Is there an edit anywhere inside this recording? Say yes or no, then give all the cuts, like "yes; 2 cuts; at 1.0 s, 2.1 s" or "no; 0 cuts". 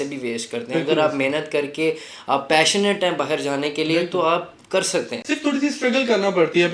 no; 0 cuts